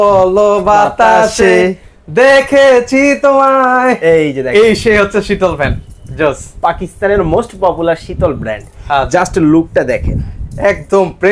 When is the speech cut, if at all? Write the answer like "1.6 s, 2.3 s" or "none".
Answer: none